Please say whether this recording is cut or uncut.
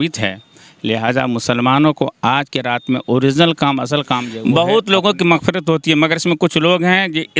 cut